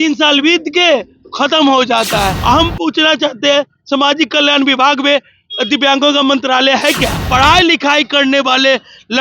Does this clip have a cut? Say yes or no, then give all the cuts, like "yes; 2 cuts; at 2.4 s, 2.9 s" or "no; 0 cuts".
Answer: yes; 2 cuts; at 2.4 s, 7.2 s